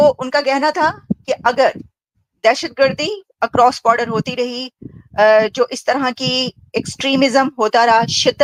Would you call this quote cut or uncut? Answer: uncut